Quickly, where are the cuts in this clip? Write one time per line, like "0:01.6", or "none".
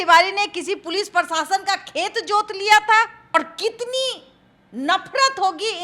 0:03.3